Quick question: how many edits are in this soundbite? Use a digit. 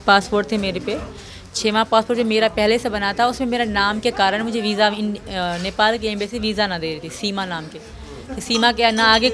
0